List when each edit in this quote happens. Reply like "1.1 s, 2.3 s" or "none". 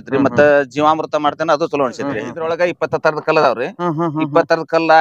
2.3 s